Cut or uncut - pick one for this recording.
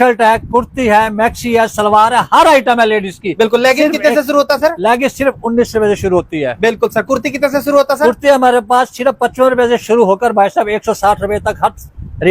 uncut